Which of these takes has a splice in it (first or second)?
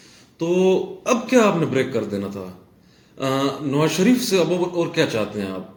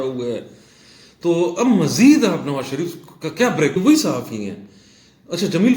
second